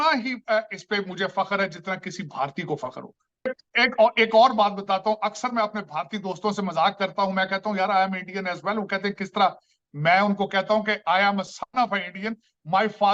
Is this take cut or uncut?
uncut